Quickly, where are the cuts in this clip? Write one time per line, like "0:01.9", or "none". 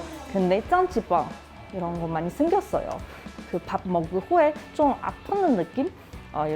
0:03.3